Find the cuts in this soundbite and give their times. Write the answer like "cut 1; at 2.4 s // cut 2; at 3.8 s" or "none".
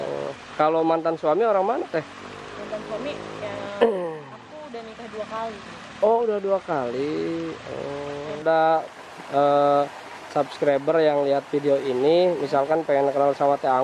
cut 1; at 8.4 s